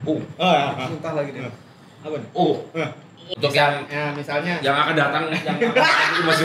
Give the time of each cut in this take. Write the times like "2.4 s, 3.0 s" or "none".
3.2 s